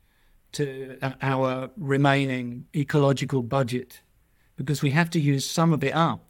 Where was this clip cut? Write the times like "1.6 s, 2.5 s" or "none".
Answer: 2.6 s

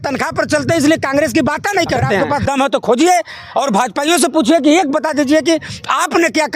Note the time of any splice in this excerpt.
2.2 s

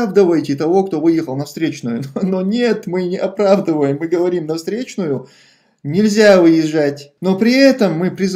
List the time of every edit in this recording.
7.1 s

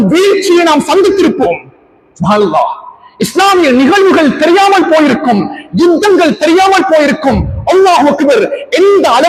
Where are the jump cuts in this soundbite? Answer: none

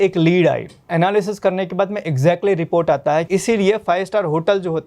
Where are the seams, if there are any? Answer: 0.9 s, 3.3 s

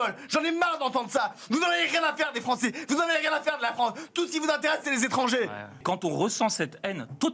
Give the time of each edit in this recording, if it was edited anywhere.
5.7 s

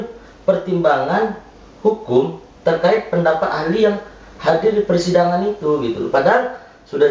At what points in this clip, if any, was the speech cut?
none

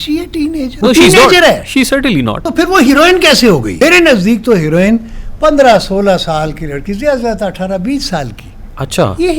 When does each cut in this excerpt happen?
0.7 s, 2.4 s, 3.7 s

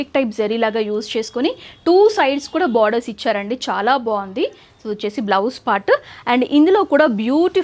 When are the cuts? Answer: none

